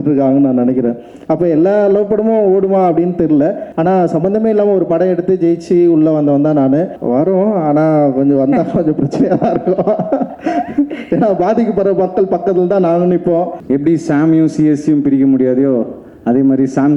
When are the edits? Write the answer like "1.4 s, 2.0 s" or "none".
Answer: 3.7 s, 7.0 s, 13.6 s